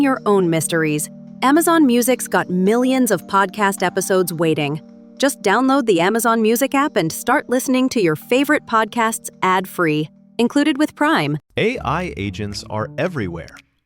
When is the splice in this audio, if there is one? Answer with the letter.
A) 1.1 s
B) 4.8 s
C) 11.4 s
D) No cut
D